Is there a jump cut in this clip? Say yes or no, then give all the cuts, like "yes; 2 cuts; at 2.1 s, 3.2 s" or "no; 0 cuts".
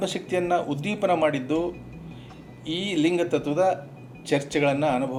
no; 0 cuts